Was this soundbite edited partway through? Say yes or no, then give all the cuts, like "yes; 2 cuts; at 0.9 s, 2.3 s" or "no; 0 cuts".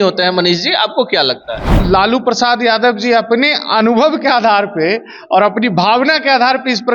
yes; 1 cut; at 1.7 s